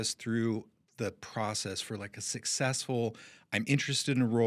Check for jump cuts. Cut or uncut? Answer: uncut